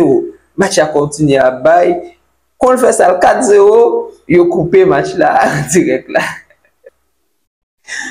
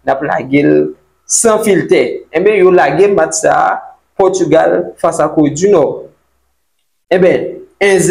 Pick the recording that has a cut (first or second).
first